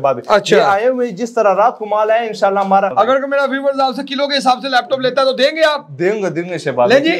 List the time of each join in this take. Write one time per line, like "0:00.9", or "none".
0:02.9